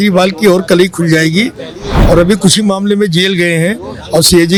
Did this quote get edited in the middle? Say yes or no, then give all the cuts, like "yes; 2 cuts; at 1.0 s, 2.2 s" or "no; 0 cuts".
no; 0 cuts